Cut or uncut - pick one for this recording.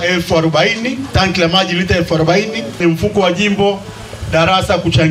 cut